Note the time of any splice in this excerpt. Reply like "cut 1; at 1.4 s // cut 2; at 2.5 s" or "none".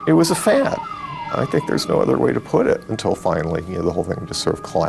cut 1; at 2.9 s